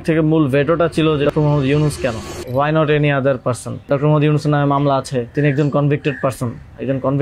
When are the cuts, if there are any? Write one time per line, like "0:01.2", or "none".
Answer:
0:01.3
0:02.3
0:03.9
0:05.3